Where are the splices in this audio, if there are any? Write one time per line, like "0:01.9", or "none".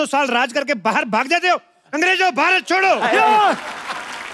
none